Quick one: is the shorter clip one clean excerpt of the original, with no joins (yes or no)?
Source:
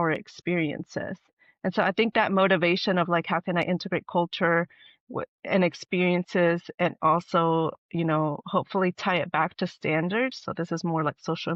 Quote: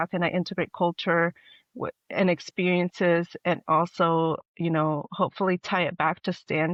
yes